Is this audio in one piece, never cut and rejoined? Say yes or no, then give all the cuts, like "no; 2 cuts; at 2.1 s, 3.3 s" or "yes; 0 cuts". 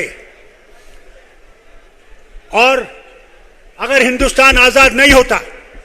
yes; 0 cuts